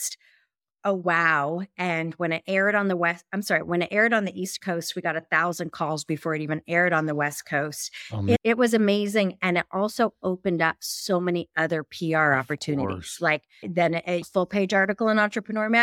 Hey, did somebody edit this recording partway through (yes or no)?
no